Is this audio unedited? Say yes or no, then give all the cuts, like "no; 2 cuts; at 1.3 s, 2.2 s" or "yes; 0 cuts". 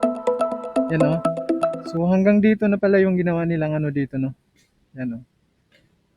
no; 1 cut; at 1.8 s